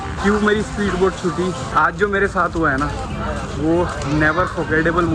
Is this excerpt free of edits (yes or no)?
no